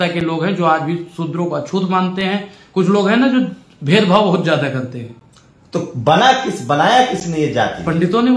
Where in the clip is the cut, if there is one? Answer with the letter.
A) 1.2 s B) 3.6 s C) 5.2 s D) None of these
D